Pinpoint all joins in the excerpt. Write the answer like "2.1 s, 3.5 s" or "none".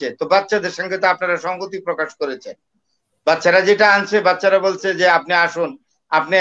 none